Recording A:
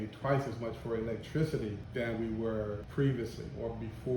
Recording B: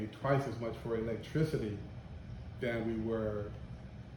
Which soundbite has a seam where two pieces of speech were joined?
A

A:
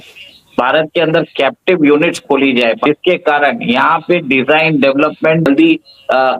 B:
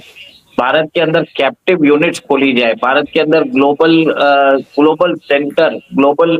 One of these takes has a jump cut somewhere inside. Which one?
A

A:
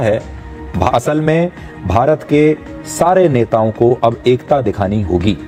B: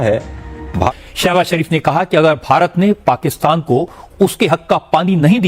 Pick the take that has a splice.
B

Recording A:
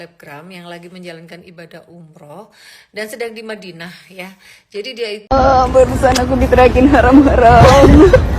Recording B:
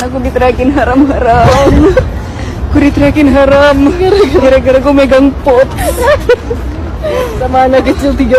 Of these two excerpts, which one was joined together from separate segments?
A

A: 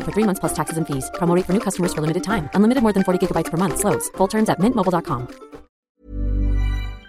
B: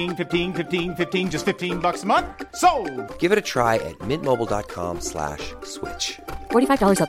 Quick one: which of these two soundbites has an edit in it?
A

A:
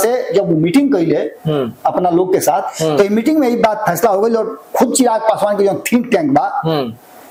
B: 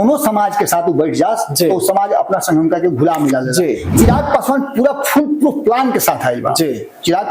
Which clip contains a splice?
B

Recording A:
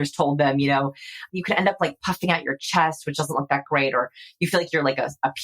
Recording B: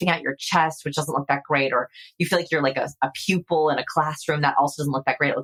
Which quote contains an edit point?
A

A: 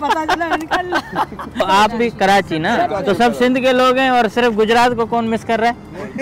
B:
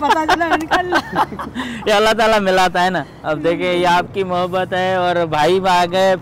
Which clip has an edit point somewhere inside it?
A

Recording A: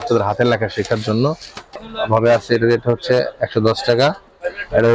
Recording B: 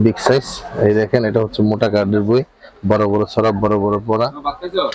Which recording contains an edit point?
A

